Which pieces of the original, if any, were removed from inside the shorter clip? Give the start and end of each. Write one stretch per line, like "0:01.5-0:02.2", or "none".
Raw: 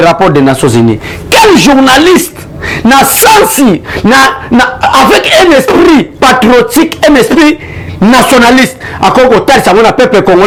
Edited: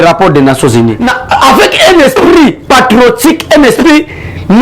0:01.1-0:04.6